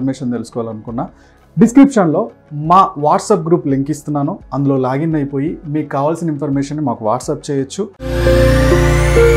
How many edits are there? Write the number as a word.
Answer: one